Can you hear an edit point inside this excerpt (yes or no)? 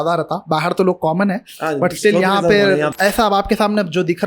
yes